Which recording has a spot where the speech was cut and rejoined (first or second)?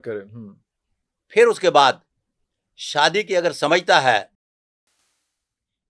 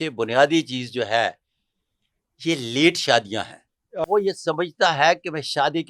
second